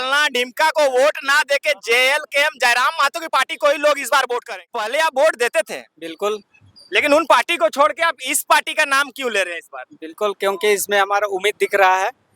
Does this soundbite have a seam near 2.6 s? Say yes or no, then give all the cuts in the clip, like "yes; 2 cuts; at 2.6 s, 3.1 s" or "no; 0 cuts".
no; 1 cut; at 4.9 s